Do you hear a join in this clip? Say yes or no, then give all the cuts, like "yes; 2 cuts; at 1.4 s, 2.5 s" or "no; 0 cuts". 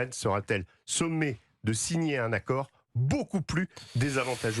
no; 0 cuts